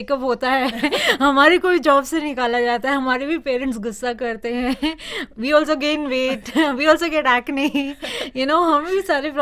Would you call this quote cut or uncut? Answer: uncut